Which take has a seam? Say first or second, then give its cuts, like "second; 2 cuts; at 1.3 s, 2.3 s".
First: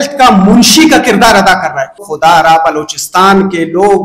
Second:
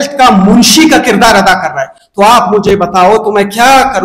first; 1 cut; at 2.2 s